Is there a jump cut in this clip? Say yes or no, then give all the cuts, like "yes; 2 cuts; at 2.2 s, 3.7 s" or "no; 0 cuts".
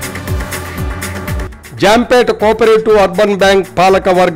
yes; 1 cut; at 1.4 s